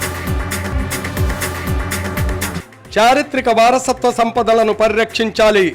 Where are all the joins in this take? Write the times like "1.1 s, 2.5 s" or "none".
2.5 s

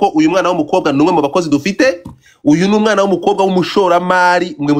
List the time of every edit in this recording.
none

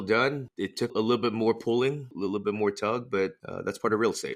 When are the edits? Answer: 0.9 s, 2.1 s, 3.5 s

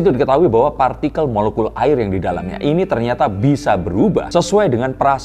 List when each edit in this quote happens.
4.3 s

